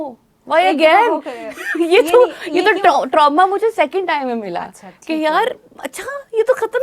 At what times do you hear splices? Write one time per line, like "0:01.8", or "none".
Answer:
none